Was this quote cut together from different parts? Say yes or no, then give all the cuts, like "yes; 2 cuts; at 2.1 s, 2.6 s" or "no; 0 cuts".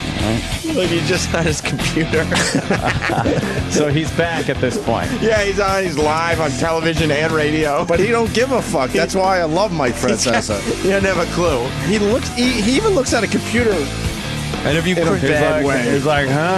yes; 1 cut; at 14.6 s